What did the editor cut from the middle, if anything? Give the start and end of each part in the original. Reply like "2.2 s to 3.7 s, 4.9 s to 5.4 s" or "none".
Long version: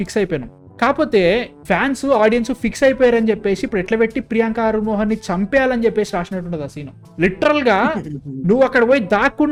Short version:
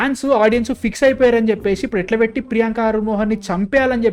none